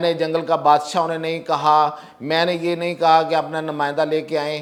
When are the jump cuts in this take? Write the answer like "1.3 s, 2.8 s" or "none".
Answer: none